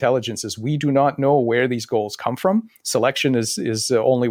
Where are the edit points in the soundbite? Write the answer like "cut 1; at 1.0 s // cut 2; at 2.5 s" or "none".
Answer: none